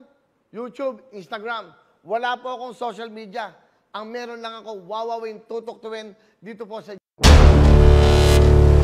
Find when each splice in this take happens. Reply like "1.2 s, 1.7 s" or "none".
7.0 s